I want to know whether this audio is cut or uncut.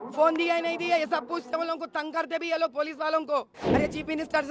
cut